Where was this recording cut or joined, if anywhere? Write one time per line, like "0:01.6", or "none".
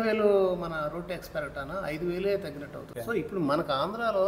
0:02.9